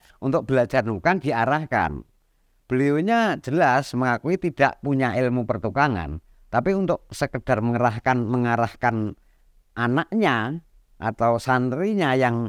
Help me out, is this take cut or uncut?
uncut